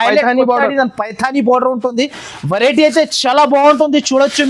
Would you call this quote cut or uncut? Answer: uncut